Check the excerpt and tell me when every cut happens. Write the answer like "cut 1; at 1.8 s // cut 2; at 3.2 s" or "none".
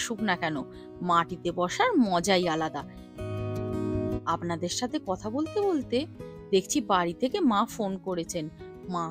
none